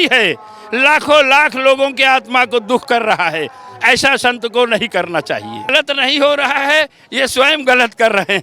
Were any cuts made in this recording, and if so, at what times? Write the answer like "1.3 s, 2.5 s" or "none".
5.7 s